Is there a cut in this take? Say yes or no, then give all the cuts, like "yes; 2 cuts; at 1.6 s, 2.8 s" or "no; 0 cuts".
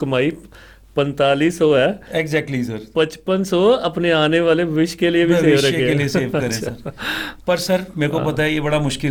no; 0 cuts